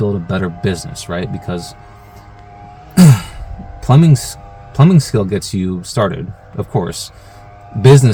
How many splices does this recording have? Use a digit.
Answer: 0